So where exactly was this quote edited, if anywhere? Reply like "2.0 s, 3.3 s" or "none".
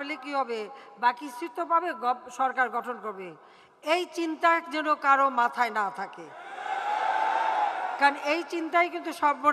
none